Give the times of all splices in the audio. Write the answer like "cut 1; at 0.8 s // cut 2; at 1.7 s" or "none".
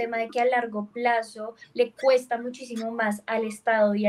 none